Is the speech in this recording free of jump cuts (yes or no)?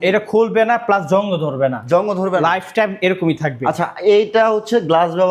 yes